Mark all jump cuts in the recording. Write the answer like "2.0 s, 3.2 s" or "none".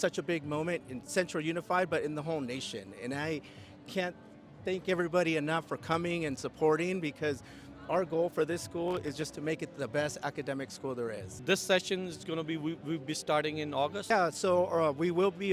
11.3 s, 14.1 s